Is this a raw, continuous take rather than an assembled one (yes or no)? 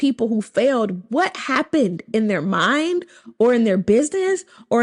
yes